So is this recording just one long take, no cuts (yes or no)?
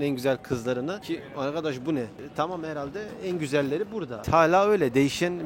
no